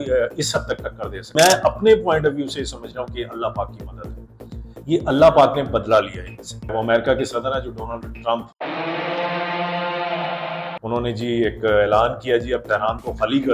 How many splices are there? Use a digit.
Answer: 2